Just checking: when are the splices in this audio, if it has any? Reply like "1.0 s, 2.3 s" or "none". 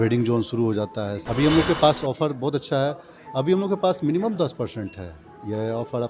1.2 s